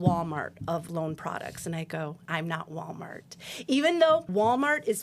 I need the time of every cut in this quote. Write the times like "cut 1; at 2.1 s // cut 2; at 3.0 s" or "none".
cut 1; at 0.9 s // cut 2; at 2.2 s // cut 3; at 4.3 s